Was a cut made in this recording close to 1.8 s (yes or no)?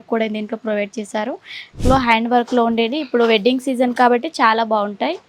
yes